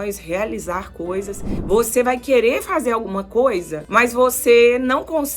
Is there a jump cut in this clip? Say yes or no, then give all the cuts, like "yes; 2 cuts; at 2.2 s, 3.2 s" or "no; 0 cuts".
yes; 2 cuts; at 1.6 s, 3.8 s